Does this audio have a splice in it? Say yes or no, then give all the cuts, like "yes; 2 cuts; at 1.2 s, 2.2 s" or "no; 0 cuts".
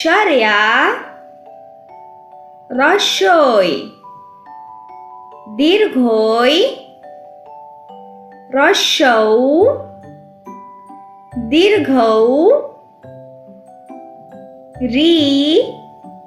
yes; 2 cuts; at 1.2 s, 2.6 s